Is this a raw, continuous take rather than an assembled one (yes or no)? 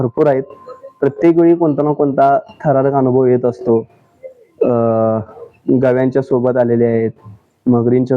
yes